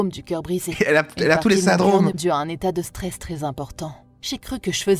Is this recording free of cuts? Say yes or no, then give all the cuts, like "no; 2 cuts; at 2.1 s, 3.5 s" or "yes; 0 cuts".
no; 1 cut; at 2.2 s